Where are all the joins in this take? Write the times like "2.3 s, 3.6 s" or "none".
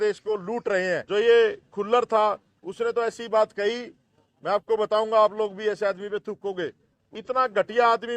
1.0 s, 7.0 s